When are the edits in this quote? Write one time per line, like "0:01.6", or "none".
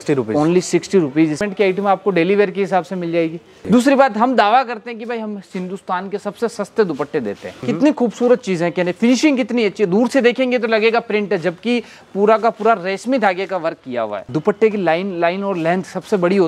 0:01.4
0:03.5
0:07.5
0:14.2